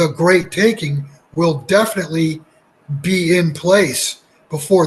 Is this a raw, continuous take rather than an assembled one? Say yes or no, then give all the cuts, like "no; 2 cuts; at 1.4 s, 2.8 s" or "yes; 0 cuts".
yes; 0 cuts